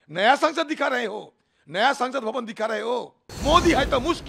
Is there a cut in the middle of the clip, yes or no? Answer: yes